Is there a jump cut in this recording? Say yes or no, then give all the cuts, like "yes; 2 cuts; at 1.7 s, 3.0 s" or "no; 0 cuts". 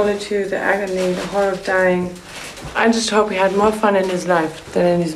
yes; 1 cut; at 2.8 s